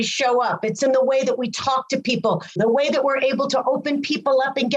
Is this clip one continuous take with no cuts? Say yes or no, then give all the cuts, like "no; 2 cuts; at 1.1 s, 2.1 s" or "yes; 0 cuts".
no; 1 cut; at 2.6 s